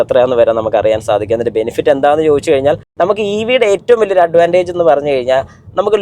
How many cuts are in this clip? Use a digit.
1